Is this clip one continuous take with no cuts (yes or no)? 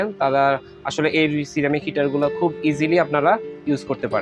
yes